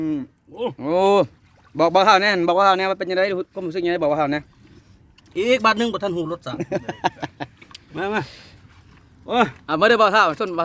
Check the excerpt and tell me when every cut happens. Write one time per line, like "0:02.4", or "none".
none